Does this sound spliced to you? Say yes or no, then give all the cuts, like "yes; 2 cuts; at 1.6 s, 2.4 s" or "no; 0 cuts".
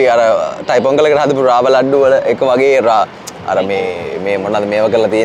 no; 0 cuts